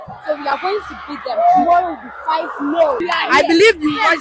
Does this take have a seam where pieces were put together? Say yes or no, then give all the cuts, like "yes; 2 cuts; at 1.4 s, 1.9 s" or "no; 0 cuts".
yes; 1 cut; at 3.0 s